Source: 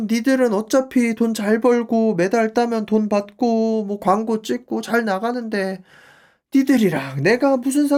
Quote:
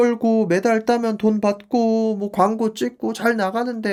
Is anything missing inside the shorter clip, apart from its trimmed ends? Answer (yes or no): no